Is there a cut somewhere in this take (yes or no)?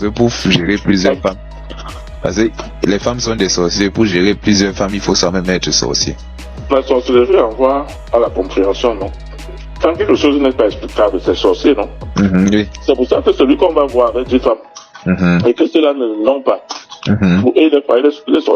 no